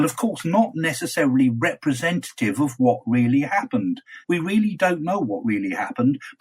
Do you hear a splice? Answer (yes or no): yes